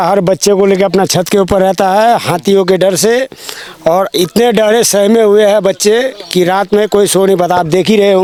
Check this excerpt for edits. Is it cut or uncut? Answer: uncut